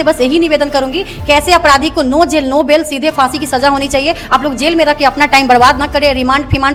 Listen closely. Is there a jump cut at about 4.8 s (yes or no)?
no